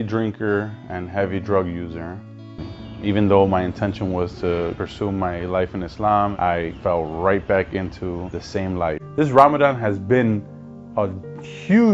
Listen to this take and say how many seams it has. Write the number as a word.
two